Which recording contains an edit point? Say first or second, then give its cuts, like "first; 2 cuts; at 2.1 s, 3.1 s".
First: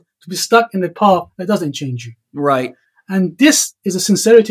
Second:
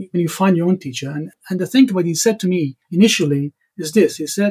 second; 2 cuts; at 1.3 s, 2.8 s